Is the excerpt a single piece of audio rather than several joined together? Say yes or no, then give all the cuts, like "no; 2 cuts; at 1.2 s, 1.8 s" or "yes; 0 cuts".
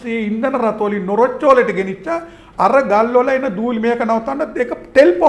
yes; 0 cuts